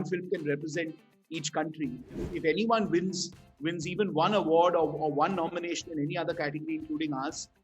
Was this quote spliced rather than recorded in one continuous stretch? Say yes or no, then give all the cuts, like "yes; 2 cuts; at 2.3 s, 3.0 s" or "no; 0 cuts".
yes; 1 cut; at 2.3 s